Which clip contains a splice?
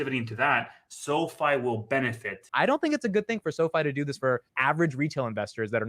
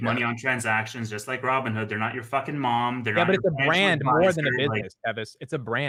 first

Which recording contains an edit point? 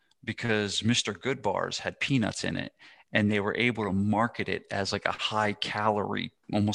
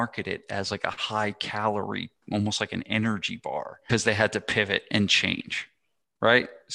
second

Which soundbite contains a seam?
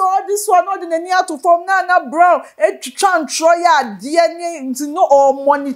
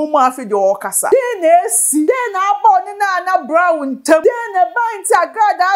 second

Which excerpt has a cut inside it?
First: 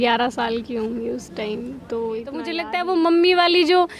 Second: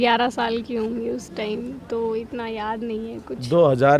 first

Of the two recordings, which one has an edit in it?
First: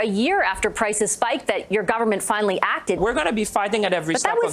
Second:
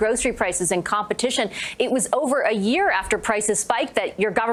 first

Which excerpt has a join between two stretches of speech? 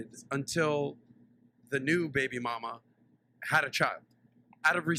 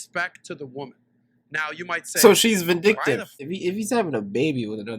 second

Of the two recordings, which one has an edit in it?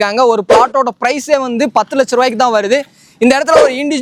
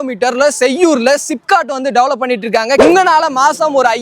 second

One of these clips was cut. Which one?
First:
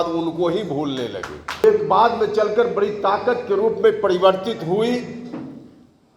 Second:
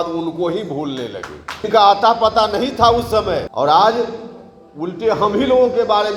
second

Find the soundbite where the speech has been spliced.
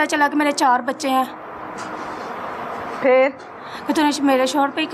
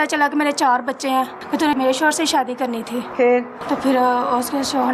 second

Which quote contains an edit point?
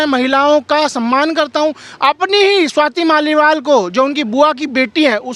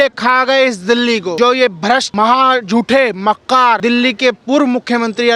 second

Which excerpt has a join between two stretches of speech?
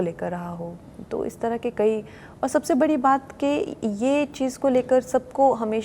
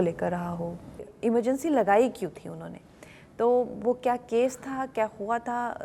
second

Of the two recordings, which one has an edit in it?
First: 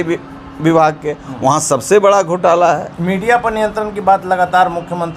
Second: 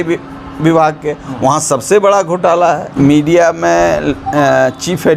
second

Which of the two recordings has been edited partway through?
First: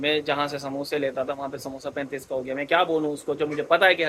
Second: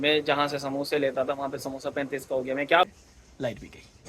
second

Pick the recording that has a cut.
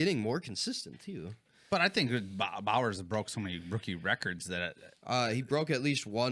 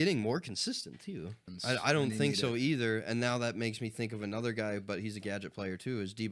second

